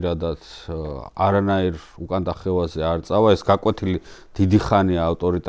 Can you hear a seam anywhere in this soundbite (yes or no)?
no